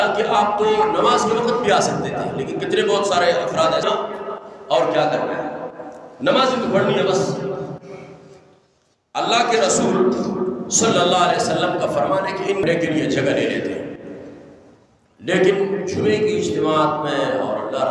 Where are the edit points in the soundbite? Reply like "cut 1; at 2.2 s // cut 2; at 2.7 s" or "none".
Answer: cut 1; at 3.8 s // cut 2; at 12.6 s